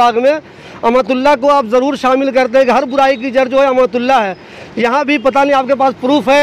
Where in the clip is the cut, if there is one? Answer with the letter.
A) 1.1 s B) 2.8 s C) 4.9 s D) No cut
D